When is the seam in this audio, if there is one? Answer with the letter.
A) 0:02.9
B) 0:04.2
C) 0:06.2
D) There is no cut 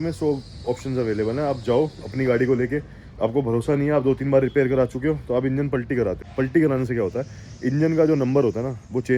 C